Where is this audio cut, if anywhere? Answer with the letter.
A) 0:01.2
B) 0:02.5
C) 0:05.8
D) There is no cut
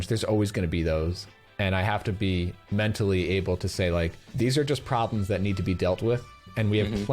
A